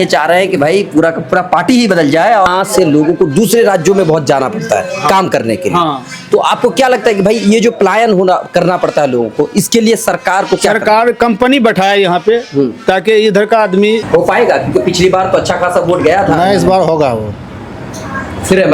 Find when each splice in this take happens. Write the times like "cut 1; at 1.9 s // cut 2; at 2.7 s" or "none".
cut 1; at 2.5 s // cut 2; at 14.0 s